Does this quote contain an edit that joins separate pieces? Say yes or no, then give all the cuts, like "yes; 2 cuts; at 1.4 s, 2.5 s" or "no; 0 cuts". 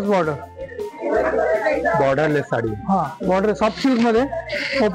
yes; 1 cut; at 1.0 s